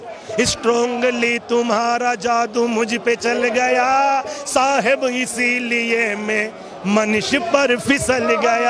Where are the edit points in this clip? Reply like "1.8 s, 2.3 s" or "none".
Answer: none